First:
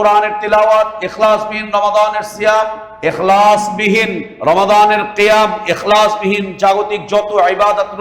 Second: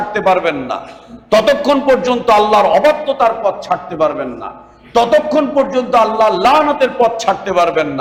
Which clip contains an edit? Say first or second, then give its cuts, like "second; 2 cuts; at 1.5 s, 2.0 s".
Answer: first; 2 cuts; at 2.8 s, 4.2 s